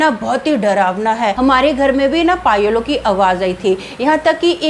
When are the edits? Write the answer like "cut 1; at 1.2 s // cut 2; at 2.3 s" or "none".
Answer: cut 1; at 1.4 s